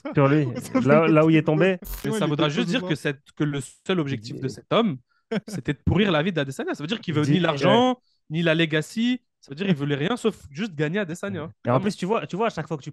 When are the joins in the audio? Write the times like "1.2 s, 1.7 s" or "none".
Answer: 2.0 s